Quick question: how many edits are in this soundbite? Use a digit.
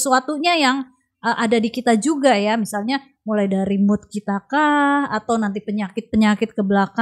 0